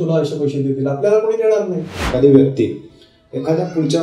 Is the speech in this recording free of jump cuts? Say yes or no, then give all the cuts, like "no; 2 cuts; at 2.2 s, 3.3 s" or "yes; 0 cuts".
no; 1 cut; at 2.1 s